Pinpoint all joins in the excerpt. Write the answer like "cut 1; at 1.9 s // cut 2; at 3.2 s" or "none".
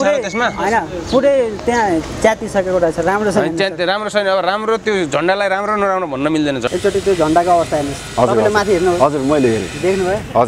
cut 1; at 6.7 s